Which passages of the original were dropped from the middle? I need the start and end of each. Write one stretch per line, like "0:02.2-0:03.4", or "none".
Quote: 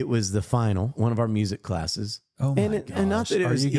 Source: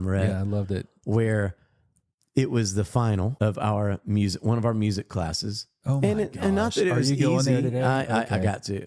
0:03.3-0:04.4

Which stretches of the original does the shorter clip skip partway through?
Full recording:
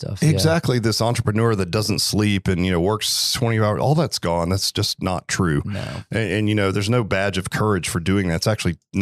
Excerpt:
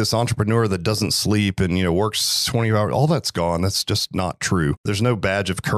0:05.7-0:06.7

